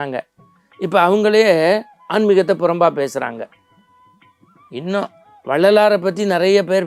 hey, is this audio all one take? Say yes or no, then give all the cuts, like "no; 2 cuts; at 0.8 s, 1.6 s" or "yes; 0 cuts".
yes; 0 cuts